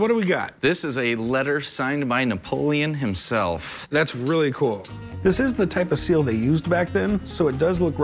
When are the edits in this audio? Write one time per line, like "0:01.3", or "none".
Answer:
none